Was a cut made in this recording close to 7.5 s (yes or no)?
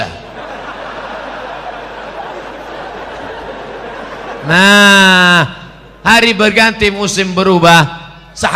no